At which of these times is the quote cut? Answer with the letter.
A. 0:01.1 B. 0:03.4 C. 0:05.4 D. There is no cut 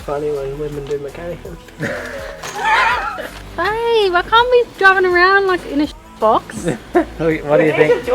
B